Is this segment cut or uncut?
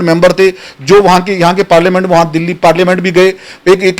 uncut